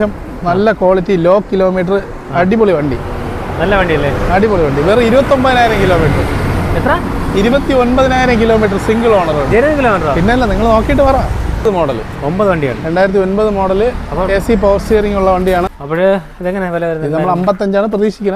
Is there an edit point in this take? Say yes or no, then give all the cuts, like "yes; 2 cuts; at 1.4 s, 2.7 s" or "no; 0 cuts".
yes; 2 cuts; at 11.7 s, 15.8 s